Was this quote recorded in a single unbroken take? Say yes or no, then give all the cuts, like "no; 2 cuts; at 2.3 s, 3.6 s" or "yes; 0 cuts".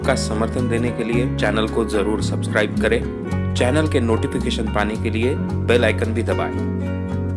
yes; 0 cuts